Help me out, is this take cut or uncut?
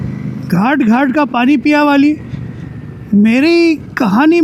uncut